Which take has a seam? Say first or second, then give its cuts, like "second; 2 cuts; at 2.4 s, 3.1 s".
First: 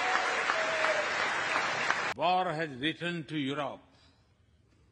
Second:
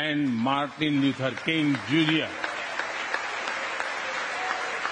first; 1 cut; at 2.1 s